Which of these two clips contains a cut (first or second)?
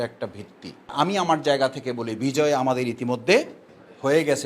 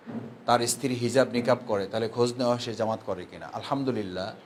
first